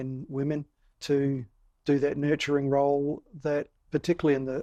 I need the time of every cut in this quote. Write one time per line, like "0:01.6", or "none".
none

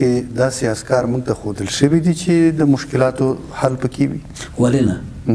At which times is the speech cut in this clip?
none

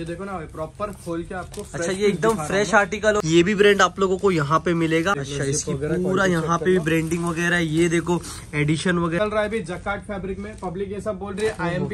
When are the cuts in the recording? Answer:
0:03.2
0:05.2
0:09.2

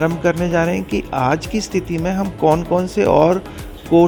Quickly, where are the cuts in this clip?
none

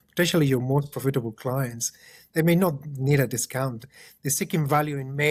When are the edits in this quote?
none

